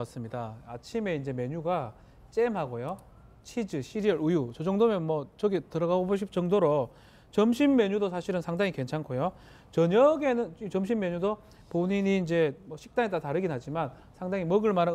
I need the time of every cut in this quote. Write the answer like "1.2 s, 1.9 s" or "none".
none